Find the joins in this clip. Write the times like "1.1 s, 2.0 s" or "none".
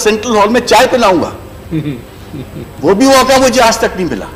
none